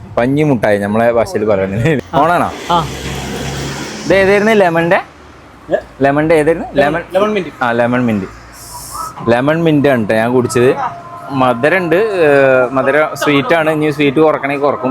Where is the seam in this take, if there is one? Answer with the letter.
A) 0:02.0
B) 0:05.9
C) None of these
A